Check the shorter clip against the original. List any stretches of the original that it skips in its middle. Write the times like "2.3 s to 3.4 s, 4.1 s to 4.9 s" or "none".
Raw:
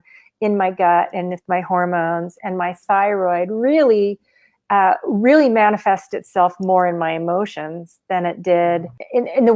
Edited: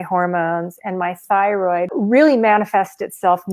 3.5 s to 5.0 s